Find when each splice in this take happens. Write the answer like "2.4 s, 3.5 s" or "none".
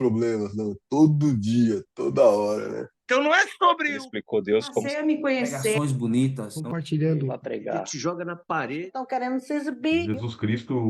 2.9 s